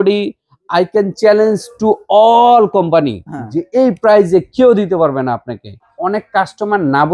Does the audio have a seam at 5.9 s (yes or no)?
yes